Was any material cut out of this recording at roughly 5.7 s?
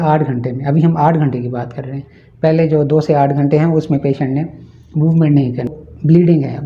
yes; 1 cut; at 5.7 s

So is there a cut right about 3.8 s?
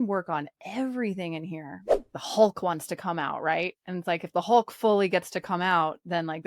no; 1 cut; at 2.1 s

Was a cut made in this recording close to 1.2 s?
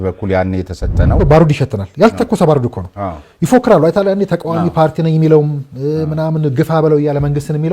yes; 1 cut; at 1.2 s

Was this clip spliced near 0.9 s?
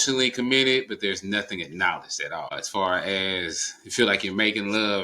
no; 1 cut; at 2.5 s

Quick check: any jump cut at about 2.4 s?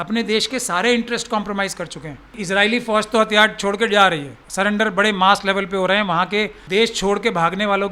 yes; 3 cuts; at 2.4 s, 4.4 s, 6.6 s

